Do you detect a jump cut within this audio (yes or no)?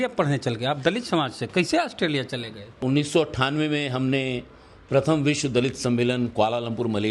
yes